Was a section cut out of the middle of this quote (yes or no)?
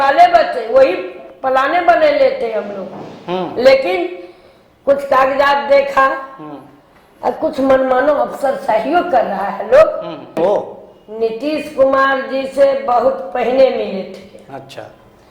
yes